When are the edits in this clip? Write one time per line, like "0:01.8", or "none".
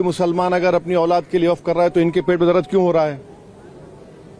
none